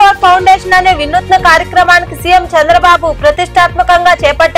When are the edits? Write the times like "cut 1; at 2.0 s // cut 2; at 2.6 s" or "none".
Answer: none